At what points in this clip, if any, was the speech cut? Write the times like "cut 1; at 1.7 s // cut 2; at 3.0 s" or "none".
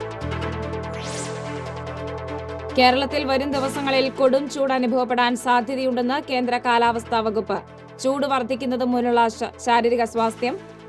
cut 1; at 1.0 s // cut 2; at 2.2 s